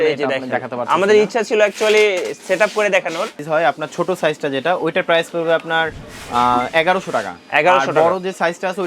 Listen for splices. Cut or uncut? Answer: cut